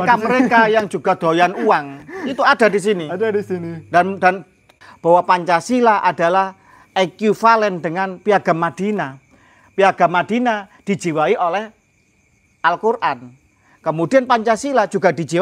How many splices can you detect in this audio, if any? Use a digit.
1